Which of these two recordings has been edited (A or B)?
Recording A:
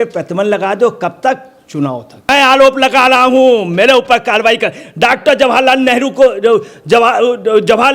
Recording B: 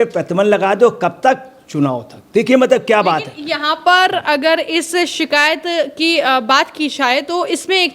A